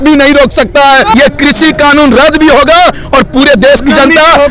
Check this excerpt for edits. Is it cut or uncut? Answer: cut